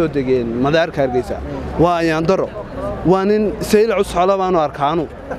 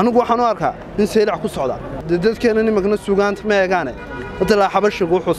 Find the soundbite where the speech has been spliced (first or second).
second